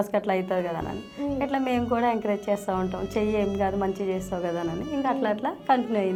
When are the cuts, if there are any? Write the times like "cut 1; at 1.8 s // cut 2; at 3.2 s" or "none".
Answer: none